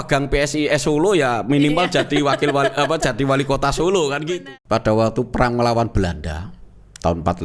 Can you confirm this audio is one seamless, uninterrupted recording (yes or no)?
no